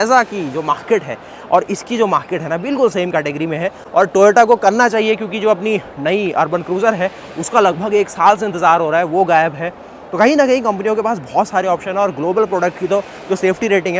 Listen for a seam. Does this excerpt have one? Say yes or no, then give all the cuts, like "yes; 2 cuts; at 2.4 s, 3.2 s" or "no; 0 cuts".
no; 0 cuts